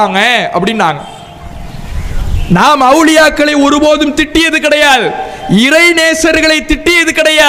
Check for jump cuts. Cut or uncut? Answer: uncut